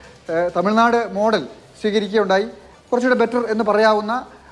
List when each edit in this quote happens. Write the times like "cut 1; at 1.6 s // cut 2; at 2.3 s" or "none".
cut 1; at 2.6 s